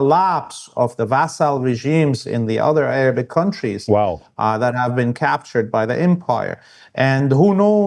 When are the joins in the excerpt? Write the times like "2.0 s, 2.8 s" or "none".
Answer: none